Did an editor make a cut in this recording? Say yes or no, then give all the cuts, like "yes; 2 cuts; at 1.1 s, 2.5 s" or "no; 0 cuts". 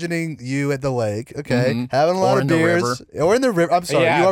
no; 0 cuts